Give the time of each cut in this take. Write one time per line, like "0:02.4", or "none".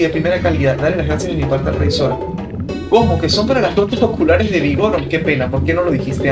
none